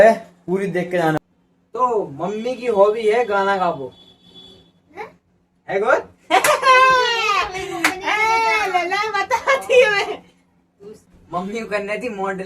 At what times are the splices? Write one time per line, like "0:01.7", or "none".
0:01.2
0:11.1